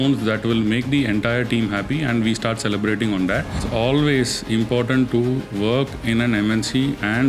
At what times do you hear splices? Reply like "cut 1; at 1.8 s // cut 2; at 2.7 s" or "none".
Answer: cut 1; at 3.6 s